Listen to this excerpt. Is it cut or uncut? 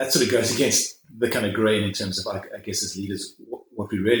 uncut